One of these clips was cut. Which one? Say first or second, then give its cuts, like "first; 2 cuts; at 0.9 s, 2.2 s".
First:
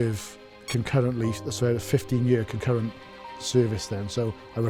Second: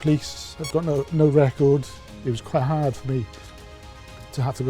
second; 1 cut; at 2.1 s